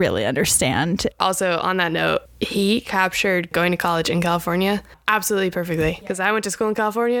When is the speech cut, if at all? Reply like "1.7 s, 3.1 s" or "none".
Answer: 1.1 s, 2.3 s

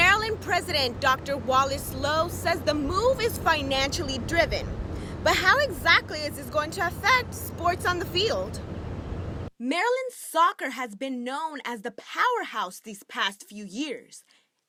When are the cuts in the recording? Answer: none

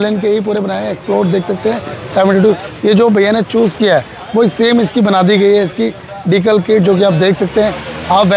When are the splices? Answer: none

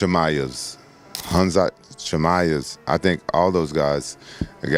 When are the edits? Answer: none

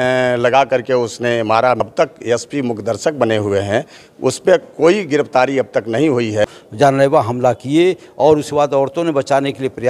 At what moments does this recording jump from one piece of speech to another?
1.8 s, 6.4 s

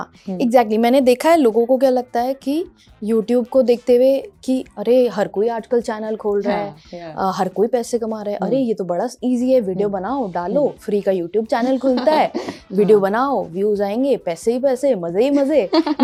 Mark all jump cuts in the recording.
none

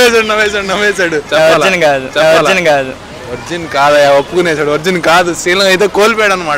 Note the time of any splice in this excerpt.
1.2 s

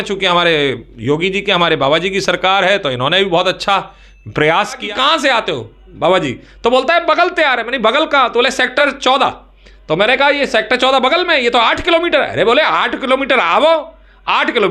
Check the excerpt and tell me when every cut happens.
4.8 s, 8.8 s

